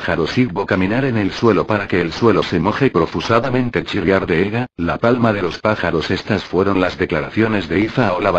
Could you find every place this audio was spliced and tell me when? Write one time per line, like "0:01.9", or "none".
0:02.4